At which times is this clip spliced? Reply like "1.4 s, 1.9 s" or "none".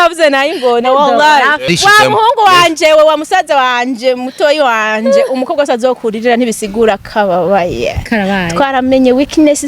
1.6 s